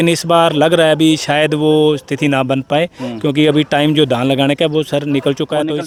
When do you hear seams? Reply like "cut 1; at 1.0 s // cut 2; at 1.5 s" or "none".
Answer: none